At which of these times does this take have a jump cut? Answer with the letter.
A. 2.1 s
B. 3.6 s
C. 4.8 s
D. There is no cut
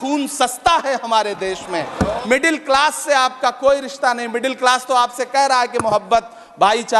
A